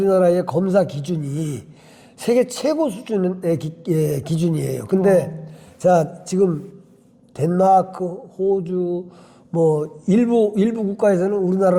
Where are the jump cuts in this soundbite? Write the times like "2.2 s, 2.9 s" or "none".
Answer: none